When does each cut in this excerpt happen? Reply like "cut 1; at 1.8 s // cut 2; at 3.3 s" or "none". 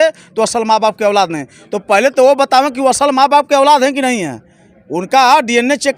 none